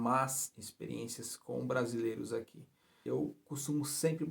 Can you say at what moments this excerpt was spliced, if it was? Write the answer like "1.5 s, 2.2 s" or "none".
2.9 s